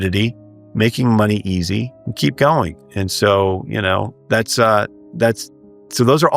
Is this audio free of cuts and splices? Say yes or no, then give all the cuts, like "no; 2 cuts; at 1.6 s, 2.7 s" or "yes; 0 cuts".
no; 2 cuts; at 2.0 s, 4.1 s